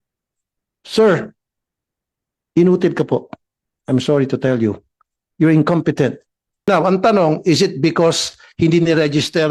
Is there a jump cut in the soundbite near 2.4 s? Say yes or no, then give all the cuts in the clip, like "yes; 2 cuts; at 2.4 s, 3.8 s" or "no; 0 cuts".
no; 1 cut; at 6.7 s